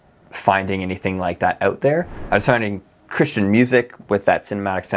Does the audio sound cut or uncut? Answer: uncut